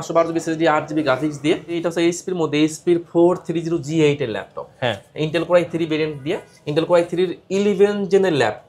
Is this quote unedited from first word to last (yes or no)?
no